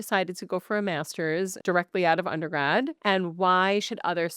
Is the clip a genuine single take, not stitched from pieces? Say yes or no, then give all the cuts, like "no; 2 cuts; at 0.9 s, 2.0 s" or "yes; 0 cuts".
no; 2 cuts; at 1.6 s, 3.0 s